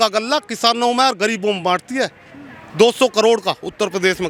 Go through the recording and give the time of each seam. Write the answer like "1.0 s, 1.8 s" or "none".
none